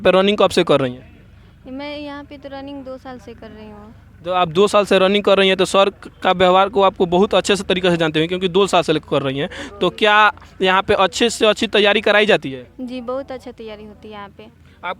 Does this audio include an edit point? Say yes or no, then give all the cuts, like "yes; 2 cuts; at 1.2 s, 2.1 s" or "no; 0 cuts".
no; 0 cuts